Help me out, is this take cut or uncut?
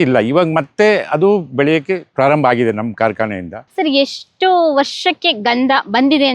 cut